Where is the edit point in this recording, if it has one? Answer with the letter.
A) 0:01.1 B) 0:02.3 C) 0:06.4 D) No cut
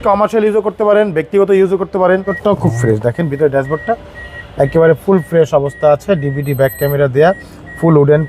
B